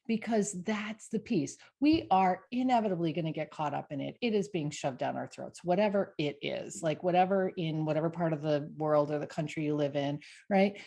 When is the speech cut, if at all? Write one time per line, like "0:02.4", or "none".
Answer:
none